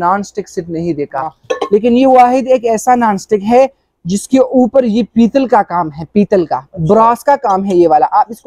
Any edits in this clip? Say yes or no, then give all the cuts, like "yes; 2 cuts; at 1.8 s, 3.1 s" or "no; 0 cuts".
yes; 1 cut; at 1.5 s